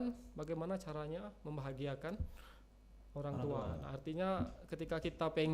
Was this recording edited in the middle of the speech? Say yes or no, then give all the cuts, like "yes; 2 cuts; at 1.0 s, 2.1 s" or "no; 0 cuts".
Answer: no; 0 cuts